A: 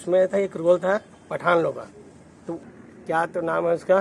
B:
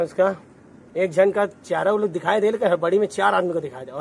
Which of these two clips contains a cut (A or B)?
A